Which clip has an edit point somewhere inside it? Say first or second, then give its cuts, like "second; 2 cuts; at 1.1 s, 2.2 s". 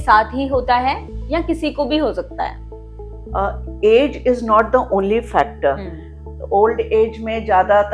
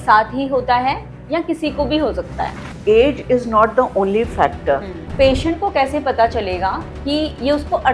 second; 2 cuts; at 2.7 s, 5.1 s